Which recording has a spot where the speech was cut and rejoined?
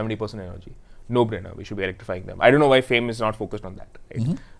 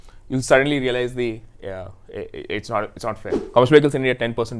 second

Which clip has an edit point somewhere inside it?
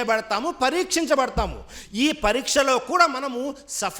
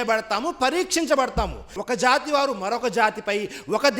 second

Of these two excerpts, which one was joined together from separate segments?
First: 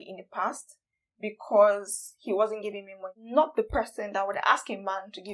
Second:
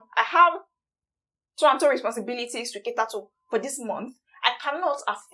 first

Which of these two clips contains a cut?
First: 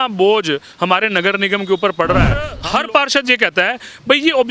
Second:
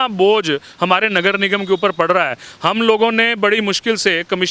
first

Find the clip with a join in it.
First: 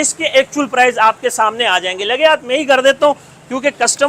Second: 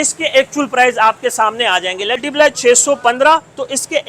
second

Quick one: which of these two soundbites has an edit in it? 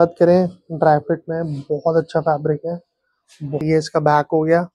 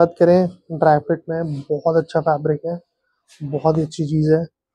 first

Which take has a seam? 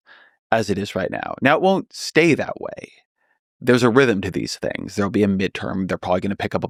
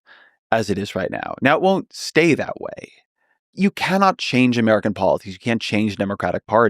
second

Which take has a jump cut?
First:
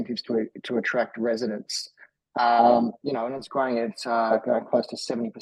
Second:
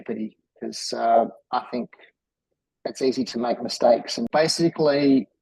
second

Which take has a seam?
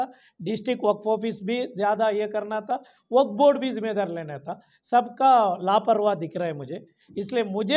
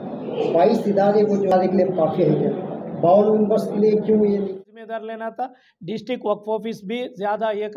second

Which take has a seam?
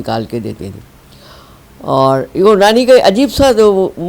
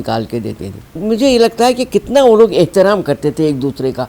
second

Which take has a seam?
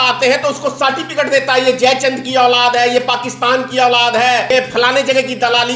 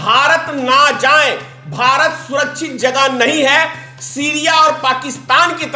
first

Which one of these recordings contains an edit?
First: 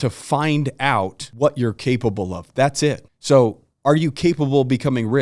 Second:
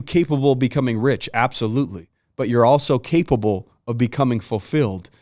first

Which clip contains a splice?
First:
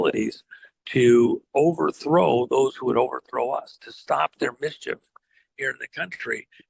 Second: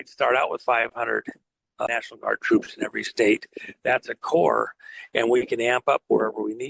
second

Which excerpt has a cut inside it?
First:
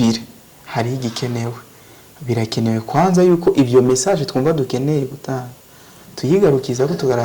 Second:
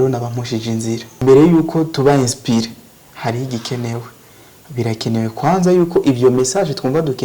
second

